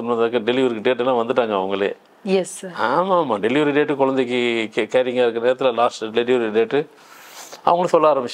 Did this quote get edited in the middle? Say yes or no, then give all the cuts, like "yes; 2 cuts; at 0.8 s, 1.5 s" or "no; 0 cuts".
no; 0 cuts